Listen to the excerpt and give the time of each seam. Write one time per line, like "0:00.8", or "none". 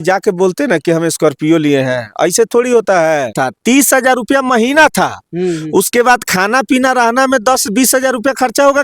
0:03.4